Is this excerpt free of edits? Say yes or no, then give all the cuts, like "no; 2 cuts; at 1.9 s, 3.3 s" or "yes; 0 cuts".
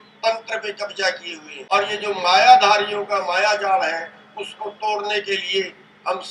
no; 1 cut; at 1.5 s